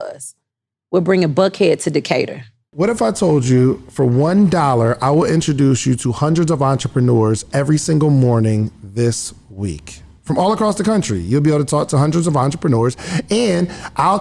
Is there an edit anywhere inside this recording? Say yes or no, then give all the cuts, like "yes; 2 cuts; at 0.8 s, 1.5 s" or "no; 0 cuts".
yes; 1 cut; at 2.7 s